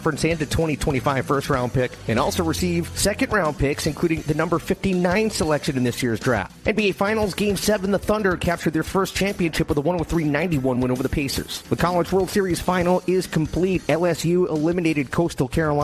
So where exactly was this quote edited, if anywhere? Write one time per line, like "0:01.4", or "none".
0:11.5